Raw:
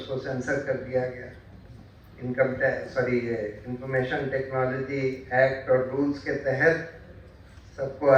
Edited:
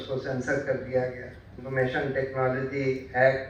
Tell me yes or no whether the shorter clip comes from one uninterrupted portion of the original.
no